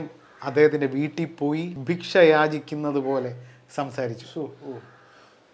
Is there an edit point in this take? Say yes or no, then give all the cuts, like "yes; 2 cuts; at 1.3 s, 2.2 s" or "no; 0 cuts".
yes; 1 cut; at 1.7 s